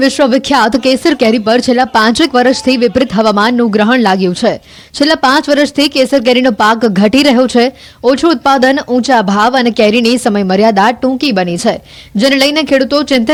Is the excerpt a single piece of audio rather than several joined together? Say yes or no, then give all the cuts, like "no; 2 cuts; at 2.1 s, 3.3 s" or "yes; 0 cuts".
yes; 0 cuts